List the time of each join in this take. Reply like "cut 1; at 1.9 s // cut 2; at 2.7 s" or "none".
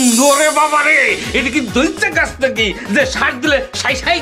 none